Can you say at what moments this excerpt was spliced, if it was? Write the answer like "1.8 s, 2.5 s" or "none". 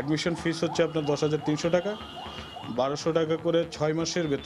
none